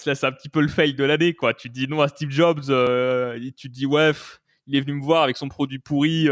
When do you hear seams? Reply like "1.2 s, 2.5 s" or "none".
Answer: none

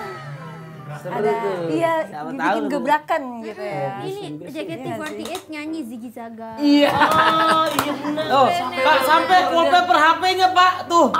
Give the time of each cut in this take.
4.0 s, 8.2 s

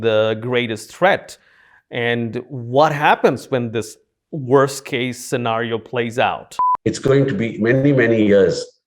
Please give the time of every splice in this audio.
6.6 s

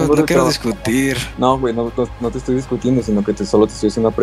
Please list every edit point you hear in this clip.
1.3 s

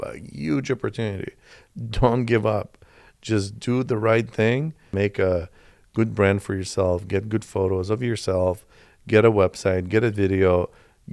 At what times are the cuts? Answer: 4.9 s

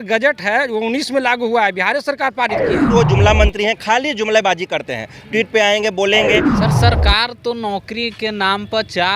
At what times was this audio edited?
2.9 s, 6.5 s

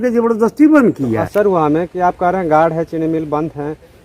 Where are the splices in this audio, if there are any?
1.2 s

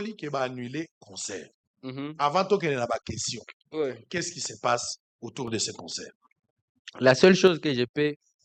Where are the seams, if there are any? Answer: none

